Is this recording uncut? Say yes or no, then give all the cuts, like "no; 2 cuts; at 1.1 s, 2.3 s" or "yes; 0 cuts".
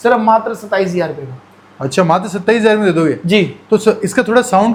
yes; 0 cuts